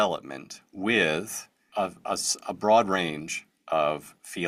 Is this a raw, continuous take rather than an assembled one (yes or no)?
yes